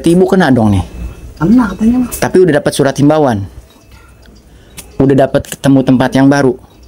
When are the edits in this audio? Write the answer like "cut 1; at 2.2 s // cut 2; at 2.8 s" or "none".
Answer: none